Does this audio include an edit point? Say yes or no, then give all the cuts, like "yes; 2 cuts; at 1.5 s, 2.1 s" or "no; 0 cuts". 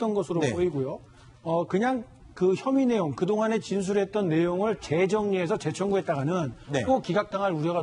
yes; 1 cut; at 6.6 s